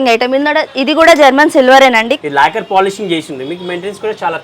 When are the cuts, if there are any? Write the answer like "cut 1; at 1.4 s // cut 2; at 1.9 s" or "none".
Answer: cut 1; at 2.1 s